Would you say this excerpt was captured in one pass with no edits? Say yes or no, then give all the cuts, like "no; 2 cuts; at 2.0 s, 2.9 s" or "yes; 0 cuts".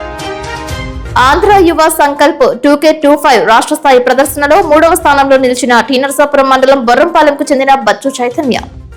no; 1 cut; at 1.0 s